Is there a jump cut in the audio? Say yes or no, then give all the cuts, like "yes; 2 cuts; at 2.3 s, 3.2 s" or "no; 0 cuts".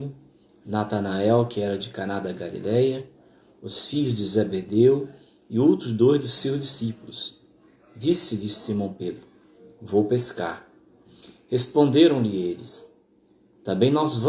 yes; 1 cut; at 12.3 s